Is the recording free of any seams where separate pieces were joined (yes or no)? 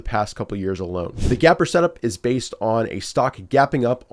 no